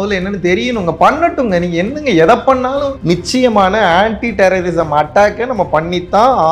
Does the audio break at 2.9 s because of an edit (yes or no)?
yes